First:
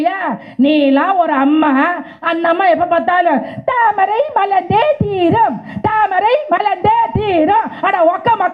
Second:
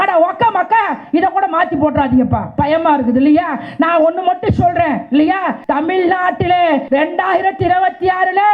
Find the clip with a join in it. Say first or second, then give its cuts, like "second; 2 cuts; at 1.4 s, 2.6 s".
second; 3 cuts; at 2.4 s, 5.6 s, 6.8 s